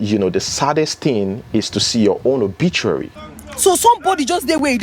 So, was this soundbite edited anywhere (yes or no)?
yes